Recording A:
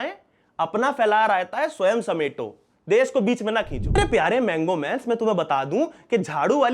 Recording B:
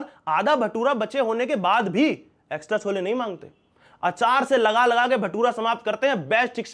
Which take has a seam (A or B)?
A